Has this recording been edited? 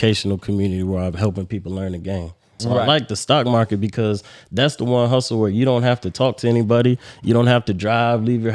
yes; 1 cut; at 2.6 s

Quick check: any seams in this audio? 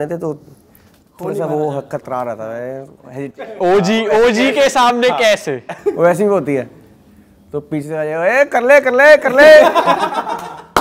no; 0 cuts

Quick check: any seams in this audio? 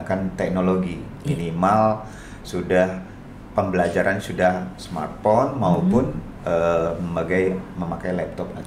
no; 0 cuts

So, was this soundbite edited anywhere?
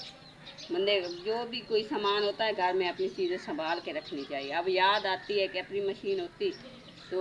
no; 0 cuts

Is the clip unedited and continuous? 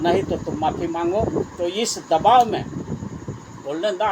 yes; 0 cuts

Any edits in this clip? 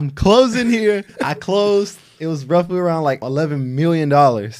yes; 2 cuts; at 1.1 s, 3.2 s

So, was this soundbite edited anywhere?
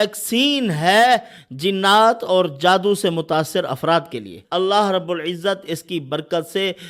yes; 1 cut; at 4.4 s

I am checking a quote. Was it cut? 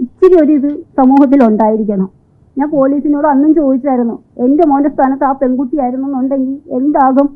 no; 0 cuts

